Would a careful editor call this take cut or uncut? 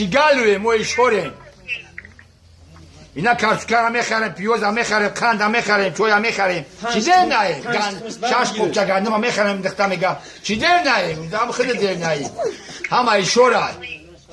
cut